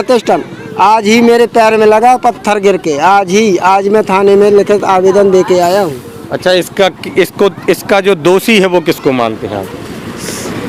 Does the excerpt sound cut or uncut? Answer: uncut